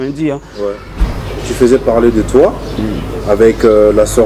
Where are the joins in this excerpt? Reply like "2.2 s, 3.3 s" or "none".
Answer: 1.0 s